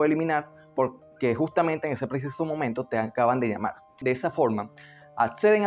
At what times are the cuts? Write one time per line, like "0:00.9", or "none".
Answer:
0:04.0